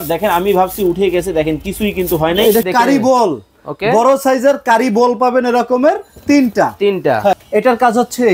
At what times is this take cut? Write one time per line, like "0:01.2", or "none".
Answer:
0:02.7
0:07.3